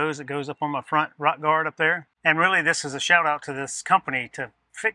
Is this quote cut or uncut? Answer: cut